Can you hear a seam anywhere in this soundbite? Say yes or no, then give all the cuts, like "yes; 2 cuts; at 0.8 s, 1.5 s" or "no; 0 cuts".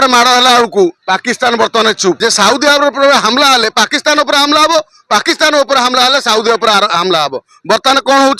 yes; 1 cut; at 2.2 s